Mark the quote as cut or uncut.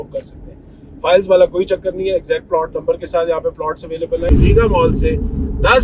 cut